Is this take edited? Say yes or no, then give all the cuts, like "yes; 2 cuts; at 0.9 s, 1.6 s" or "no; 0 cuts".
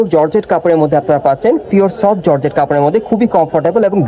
no; 0 cuts